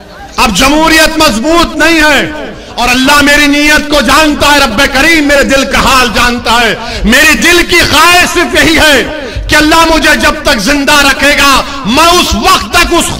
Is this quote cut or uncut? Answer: cut